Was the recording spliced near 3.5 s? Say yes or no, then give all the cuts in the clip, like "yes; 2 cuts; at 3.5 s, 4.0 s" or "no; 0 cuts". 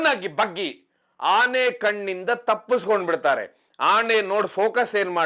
no; 1 cut; at 1.1 s